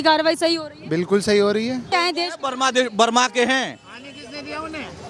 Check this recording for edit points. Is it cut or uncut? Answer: cut